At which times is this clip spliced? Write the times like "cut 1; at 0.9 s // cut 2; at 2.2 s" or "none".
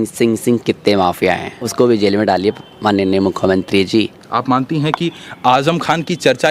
cut 1; at 1.6 s // cut 2; at 4.1 s

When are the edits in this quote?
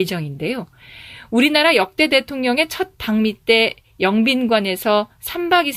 none

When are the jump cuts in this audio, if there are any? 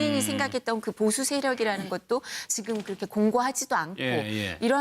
cut 1; at 2.2 s

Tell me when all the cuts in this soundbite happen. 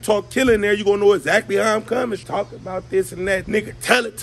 cut 1; at 2.2 s // cut 2; at 3.4 s

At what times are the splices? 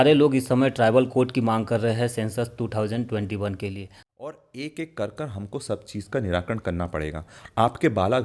cut 1; at 3.9 s

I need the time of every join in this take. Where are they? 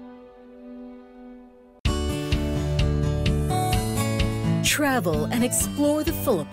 cut 1; at 1.6 s

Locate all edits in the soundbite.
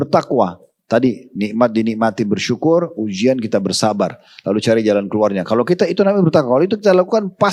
none

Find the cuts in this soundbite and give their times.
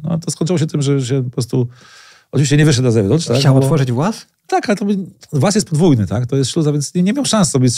none

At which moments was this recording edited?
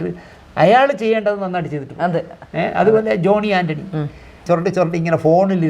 cut 1; at 4.4 s

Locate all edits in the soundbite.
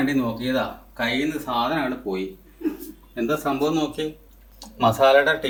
none

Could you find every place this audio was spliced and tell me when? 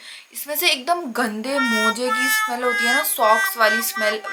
none

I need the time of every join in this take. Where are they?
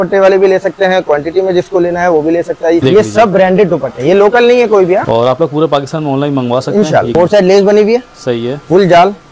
cut 1; at 2.8 s // cut 2; at 5.0 s // cut 3; at 7.1 s

